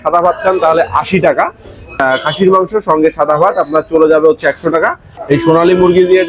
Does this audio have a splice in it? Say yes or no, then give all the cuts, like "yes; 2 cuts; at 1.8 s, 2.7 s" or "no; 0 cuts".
yes; 2 cuts; at 2.0 s, 5.1 s